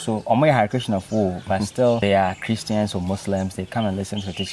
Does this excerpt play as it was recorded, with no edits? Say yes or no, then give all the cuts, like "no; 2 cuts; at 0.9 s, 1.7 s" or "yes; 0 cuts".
no; 1 cut; at 2.0 s